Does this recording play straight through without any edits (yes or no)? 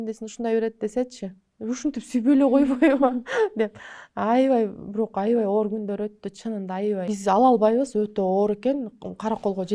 no